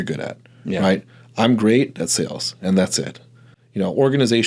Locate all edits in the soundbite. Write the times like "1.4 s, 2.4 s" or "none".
none